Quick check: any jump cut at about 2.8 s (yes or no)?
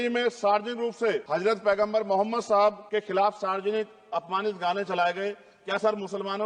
yes